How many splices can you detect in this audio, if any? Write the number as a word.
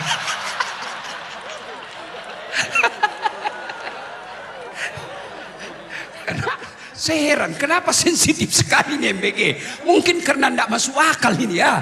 one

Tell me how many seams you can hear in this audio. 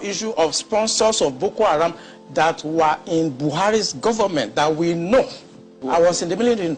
one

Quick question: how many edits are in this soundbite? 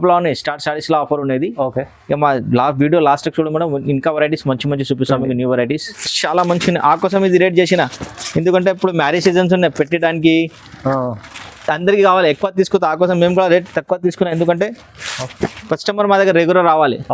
one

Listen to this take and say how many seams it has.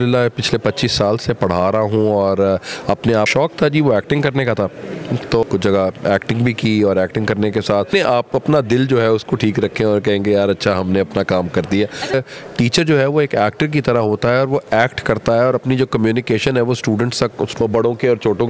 five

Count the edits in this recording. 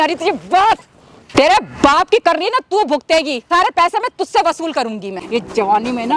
three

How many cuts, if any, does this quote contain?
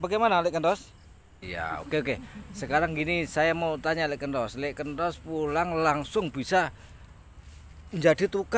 one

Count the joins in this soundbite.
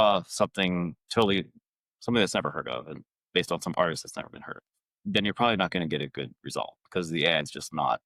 zero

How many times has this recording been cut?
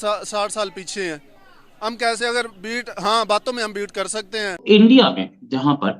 one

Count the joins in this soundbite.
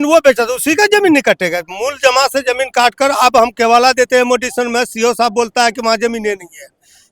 zero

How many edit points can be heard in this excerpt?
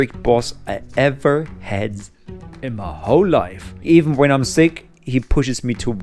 one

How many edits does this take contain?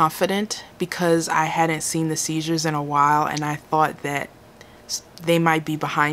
zero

